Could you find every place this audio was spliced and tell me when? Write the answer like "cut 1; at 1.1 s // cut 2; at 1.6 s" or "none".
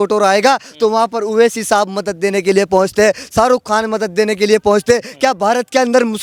none